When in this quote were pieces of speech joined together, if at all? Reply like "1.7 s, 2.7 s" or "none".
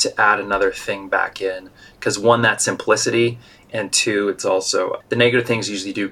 5.0 s